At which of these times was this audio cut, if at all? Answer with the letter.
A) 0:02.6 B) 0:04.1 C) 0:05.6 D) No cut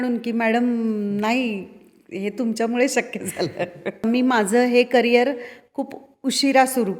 B